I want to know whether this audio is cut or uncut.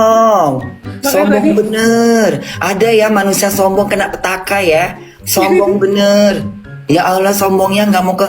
cut